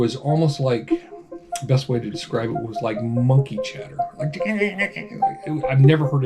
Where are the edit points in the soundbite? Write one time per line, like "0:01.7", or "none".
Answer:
none